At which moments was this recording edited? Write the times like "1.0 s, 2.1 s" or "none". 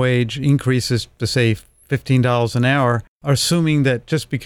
3.1 s